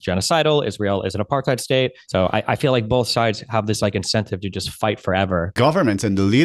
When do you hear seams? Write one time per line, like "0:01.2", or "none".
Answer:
0:02.0
0:05.5